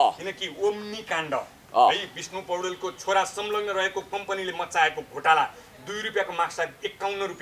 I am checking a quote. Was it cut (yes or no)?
no